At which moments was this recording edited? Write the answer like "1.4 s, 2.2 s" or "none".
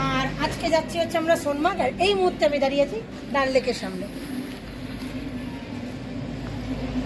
none